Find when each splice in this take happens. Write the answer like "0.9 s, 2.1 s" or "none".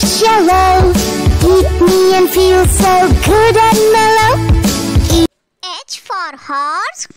none